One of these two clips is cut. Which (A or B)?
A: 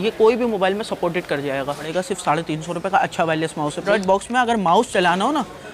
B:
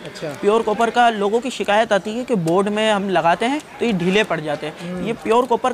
A